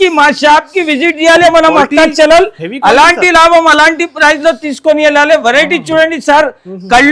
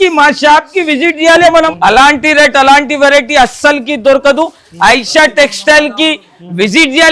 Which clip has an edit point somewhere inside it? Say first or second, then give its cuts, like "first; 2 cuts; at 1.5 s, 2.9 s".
second; 1 cut; at 1.7 s